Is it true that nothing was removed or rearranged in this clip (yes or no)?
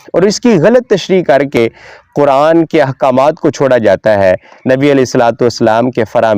yes